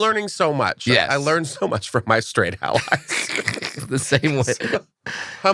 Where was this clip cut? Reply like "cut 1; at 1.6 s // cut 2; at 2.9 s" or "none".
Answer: none